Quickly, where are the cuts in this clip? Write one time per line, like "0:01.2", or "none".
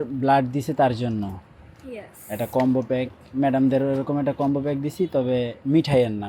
none